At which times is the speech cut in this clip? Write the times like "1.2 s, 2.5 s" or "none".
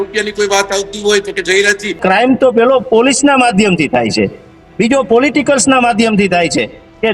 2.0 s